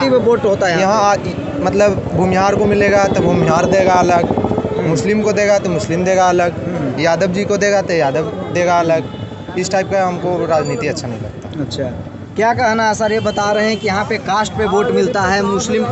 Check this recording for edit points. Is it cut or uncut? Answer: uncut